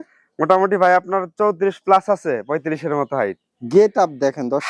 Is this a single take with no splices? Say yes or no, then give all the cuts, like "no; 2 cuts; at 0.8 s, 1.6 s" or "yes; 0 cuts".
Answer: yes; 0 cuts